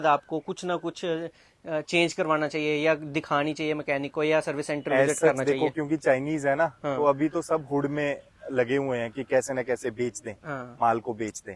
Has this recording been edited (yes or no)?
no